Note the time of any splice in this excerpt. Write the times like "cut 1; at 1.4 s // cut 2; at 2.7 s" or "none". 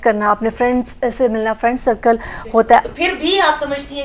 cut 1; at 2.8 s